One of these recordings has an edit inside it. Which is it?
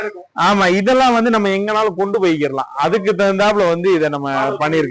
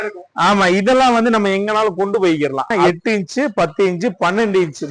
second; 1 cut; at 2.7 s

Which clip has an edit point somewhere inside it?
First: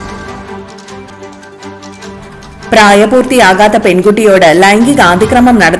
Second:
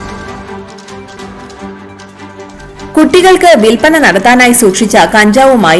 second; 1 cut; at 1.0 s

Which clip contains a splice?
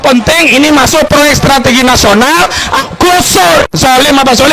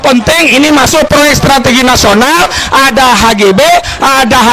first; 1 cut; at 2.8 s

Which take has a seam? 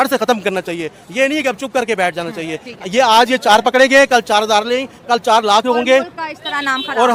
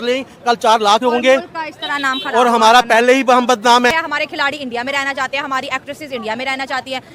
second; 1 cut; at 3.9 s

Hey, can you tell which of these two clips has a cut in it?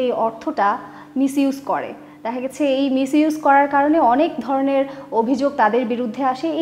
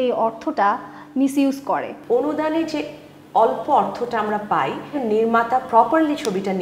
second; 2 cuts; at 1.9 s, 4.9 s

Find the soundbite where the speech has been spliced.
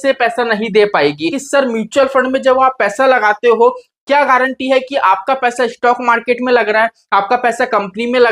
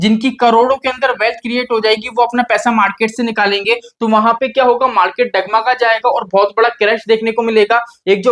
first; 1 cut; at 1.4 s

